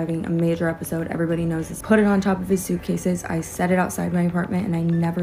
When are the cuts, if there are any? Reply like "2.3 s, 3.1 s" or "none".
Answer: none